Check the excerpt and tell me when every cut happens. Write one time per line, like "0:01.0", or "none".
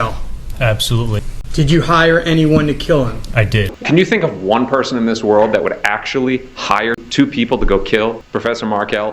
0:01.4
0:03.7
0:07.0
0:08.3